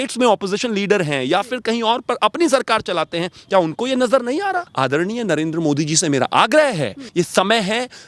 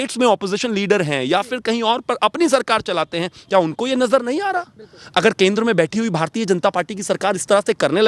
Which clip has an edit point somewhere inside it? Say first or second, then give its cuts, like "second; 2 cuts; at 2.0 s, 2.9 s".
first; 2 cuts; at 4.7 s, 7.0 s